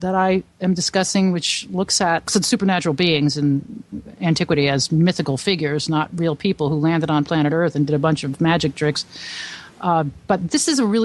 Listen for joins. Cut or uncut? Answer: cut